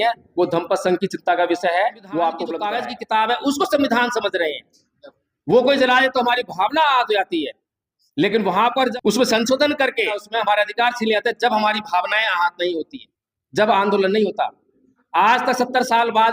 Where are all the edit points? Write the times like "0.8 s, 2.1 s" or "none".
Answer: 2.6 s, 8.9 s, 10.2 s